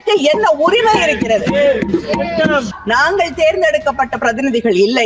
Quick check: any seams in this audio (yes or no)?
yes